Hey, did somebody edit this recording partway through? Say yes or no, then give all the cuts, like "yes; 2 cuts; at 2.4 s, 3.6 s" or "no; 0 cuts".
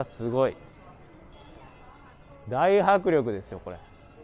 no; 0 cuts